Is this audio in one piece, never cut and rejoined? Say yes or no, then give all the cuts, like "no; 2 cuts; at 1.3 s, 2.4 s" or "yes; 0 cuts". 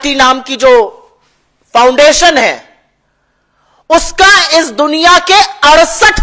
yes; 0 cuts